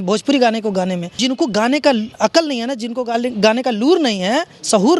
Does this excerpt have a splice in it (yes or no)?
yes